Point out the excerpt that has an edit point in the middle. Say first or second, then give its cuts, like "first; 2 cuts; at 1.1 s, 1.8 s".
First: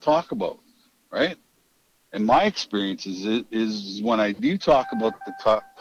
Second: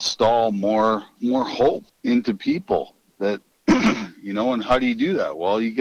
second; 3 cuts; at 1.1 s, 1.9 s, 3.5 s